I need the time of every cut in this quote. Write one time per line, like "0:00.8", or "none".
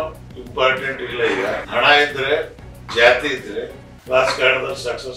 0:01.6

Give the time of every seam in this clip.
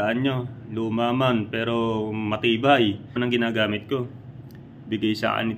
0:03.2

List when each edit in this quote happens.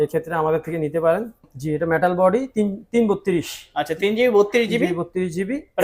0:01.4

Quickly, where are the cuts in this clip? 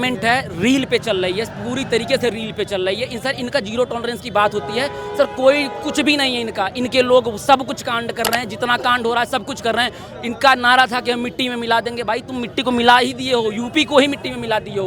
none

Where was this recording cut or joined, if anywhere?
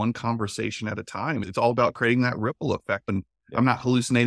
0:01.5
0:03.1

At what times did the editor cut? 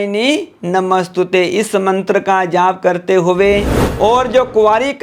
0:03.8

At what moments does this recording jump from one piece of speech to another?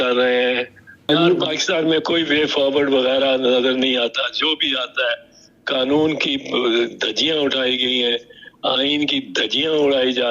0:01.0

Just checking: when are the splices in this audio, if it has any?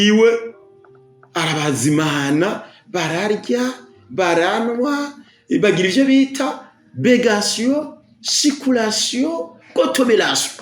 none

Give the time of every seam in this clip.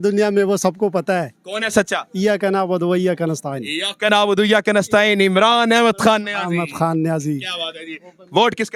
none

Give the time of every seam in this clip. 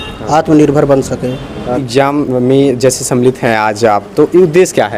0:01.9

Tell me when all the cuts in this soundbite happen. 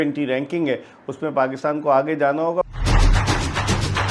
0:02.6

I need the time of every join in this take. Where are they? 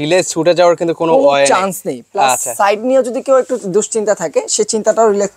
none

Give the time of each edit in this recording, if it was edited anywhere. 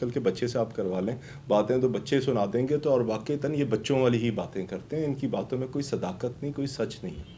none

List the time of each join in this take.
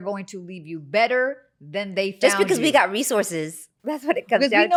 none

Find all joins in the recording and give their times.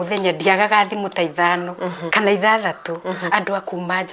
0:02.0

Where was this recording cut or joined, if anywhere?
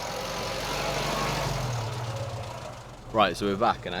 0:02.9

